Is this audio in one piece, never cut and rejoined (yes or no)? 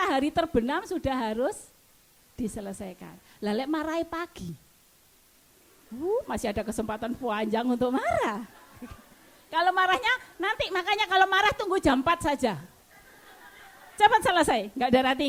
yes